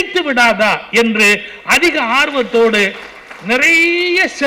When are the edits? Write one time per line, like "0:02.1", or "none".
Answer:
none